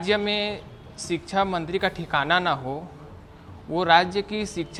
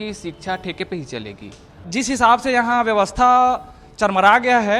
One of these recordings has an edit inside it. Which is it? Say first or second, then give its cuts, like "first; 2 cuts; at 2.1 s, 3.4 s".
second; 1 cut; at 1.8 s